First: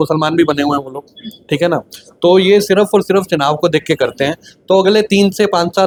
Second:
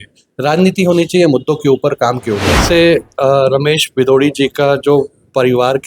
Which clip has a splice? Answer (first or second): second